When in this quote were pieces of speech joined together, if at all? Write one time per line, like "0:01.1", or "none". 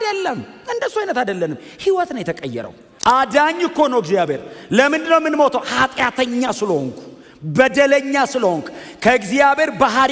0:02.8